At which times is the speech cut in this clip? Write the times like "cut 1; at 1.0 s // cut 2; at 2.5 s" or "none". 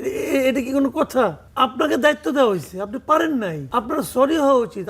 cut 1; at 1.4 s // cut 2; at 3.6 s